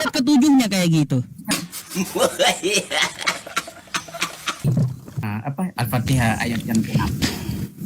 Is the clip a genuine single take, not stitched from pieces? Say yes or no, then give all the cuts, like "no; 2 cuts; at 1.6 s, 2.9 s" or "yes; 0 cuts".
no; 1 cut; at 5.3 s